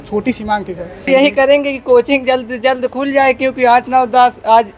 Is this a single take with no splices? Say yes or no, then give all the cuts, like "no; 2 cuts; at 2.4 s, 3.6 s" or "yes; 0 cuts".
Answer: no; 1 cut; at 1.1 s